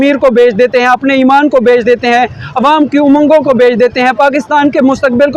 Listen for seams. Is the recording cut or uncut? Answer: uncut